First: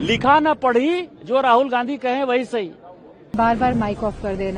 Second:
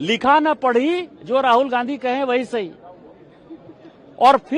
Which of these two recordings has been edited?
first; 1 cut; at 3.3 s

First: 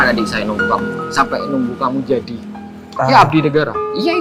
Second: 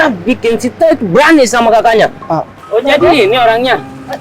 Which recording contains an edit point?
second; 1 cut; at 2.5 s

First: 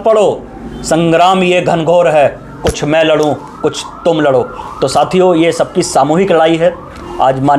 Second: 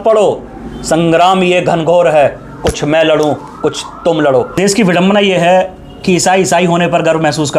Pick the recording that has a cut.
second; 1 cut; at 4.6 s

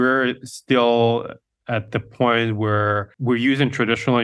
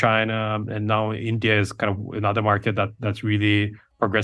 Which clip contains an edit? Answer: first; 1 cut; at 3.1 s

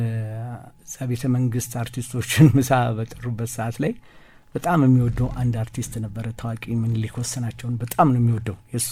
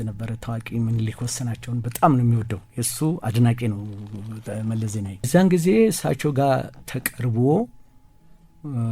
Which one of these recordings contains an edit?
second; 1 cut; at 5.3 s

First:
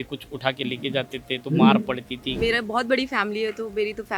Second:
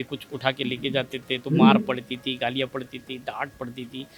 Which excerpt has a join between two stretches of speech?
first; 1 cut; at 2.3 s

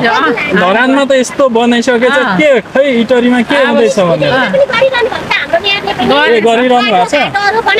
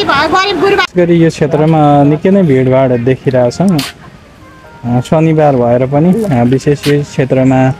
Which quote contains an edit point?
second; 1 cut; at 0.9 s

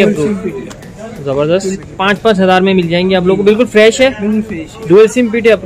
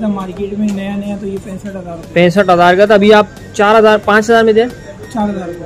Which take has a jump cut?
first; 1 cut; at 1.8 s

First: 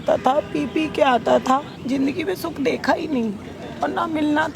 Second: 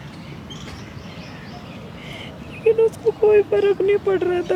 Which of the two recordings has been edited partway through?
first; 1 cut; at 1.7 s

